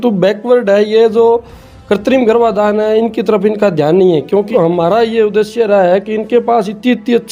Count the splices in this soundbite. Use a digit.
1